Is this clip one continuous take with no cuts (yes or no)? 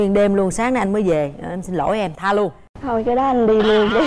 yes